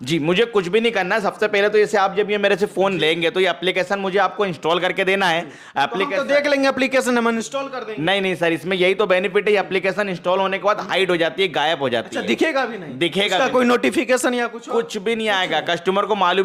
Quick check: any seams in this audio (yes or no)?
no